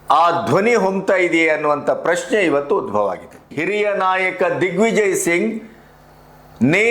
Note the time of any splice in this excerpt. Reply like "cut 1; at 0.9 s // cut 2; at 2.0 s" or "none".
cut 1; at 3.5 s